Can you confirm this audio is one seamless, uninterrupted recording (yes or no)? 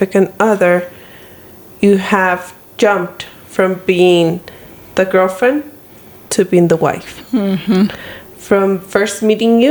yes